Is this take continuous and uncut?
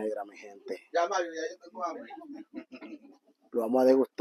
yes; 0 cuts

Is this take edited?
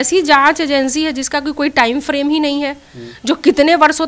no; 0 cuts

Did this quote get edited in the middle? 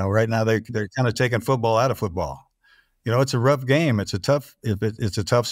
no; 0 cuts

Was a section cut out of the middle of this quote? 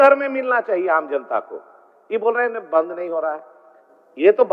no; 0 cuts

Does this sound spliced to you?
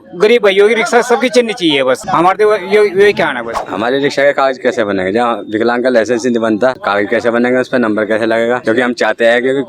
yes; 4 cuts; at 2.0 s, 3.7 s, 6.8 s, 8.6 s

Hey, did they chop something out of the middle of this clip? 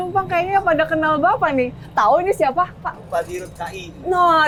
no; 0 cuts

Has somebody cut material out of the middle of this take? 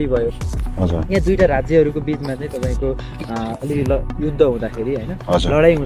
no; 0 cuts

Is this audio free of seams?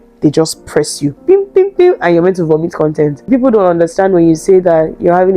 no; 1 cut; at 3.2 s

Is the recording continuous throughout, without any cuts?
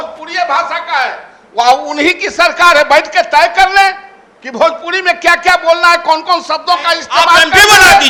yes; 0 cuts

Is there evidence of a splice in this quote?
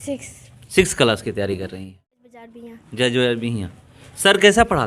yes; 1 cut; at 2.5 s

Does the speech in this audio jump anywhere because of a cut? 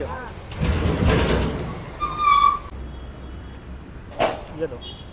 no; 0 cuts

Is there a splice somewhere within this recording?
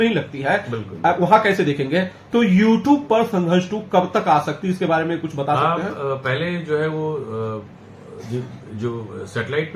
no; 0 cuts

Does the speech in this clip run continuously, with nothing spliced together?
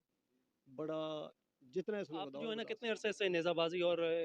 no; 1 cut; at 2.4 s

